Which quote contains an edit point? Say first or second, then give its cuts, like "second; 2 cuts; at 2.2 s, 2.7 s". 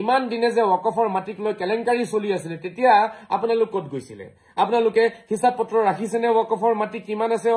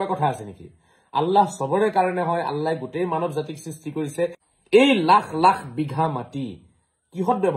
second; 1 cut; at 4.4 s